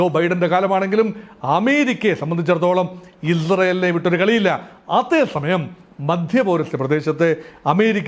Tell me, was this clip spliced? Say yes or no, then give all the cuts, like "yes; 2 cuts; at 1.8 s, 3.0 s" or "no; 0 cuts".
no; 0 cuts